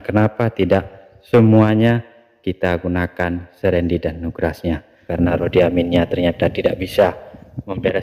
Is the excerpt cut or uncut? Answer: cut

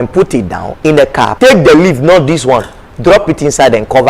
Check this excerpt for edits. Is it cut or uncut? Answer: cut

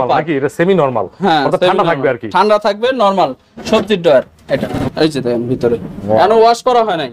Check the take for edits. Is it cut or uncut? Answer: cut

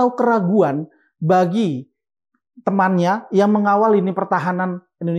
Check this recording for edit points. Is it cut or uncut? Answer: uncut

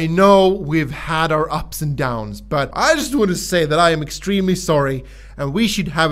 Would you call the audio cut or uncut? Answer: cut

